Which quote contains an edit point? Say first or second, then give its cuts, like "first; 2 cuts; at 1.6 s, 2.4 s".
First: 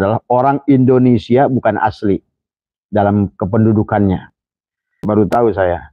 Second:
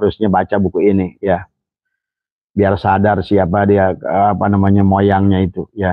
first; 1 cut; at 5.0 s